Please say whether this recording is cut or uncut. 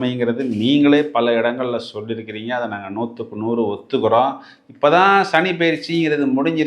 uncut